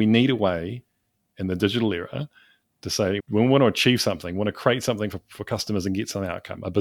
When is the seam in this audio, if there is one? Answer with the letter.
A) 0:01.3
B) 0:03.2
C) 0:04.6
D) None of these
B